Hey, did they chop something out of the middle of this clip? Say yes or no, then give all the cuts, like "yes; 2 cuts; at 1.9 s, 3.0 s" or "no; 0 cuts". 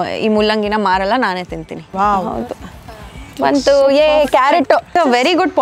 yes; 2 cuts; at 1.8 s, 4.9 s